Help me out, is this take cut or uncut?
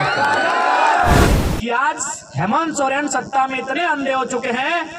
cut